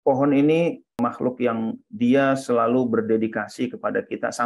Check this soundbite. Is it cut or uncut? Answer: cut